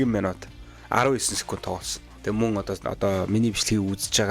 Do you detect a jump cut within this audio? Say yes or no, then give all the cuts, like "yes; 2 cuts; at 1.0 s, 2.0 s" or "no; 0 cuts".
yes; 1 cut; at 2.1 s